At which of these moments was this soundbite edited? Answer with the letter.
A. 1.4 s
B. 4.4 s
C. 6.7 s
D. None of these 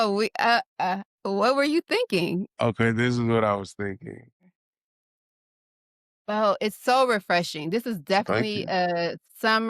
B